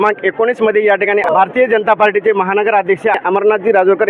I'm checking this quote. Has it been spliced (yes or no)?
yes